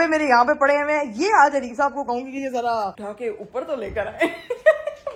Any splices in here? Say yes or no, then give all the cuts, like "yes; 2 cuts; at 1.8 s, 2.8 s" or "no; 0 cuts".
no; 0 cuts